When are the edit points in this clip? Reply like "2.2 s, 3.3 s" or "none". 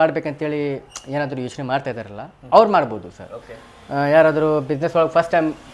none